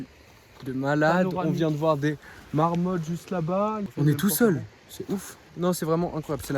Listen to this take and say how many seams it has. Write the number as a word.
two